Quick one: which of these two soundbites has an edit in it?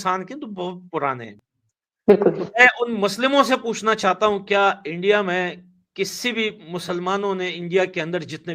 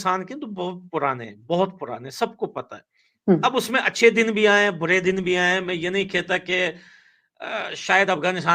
first; 1 cut; at 1.3 s

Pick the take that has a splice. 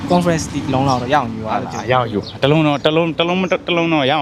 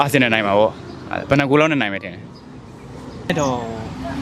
second; 1 cut; at 3.3 s

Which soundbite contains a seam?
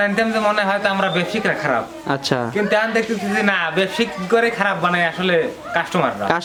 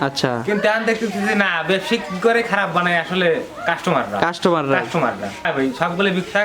second; 1 cut; at 5.4 s

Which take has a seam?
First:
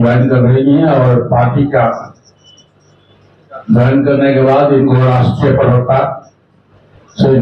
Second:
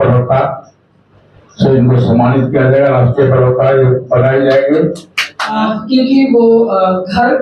second; 1 cut; at 5.4 s

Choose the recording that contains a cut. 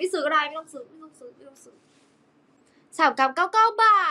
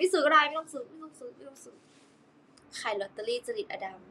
second; 1 cut; at 2.6 s

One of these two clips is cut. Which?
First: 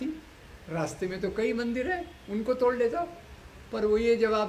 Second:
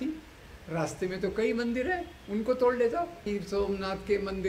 second; 1 cut; at 3.3 s

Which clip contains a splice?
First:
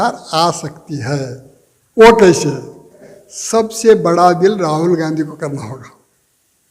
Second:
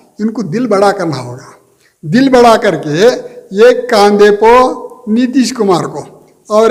first; 1 cut; at 3.1 s

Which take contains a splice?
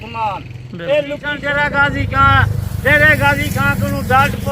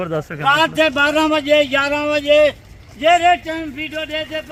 first; 1 cut; at 1.3 s

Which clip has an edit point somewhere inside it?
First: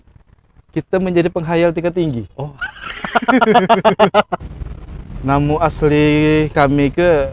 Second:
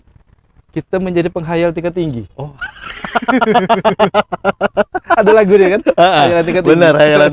first; 1 cut; at 4.3 s

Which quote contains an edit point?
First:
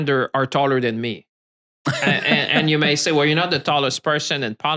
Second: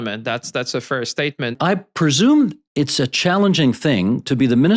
second; 1 cut; at 1.6 s

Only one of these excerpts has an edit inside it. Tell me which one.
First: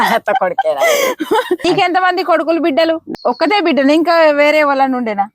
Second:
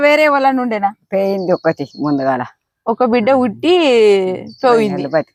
first; 2 cuts; at 1.6 s, 3.1 s

